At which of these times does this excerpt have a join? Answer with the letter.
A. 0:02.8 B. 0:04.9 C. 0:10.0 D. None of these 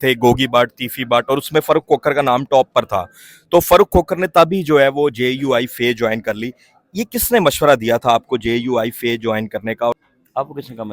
C